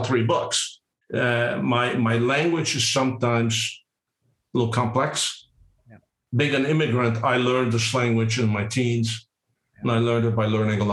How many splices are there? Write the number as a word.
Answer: one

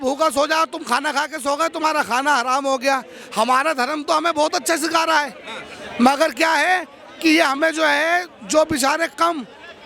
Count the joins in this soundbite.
zero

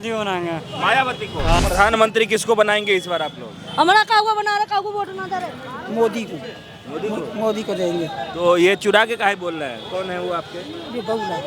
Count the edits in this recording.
one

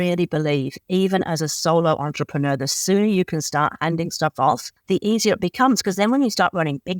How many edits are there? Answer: one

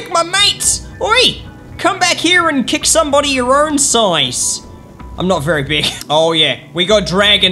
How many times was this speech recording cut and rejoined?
one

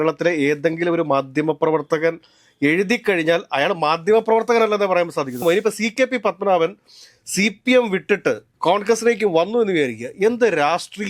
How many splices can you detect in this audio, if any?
one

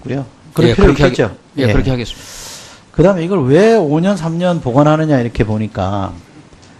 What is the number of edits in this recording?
one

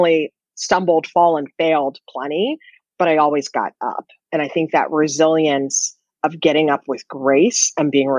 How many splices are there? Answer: zero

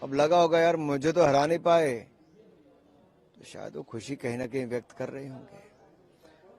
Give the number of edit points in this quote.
zero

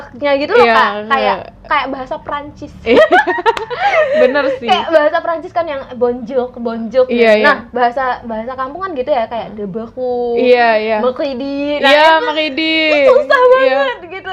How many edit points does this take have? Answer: zero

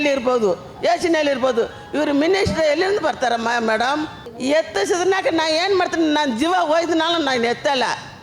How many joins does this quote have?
one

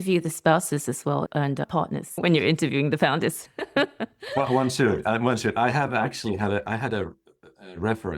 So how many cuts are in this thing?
one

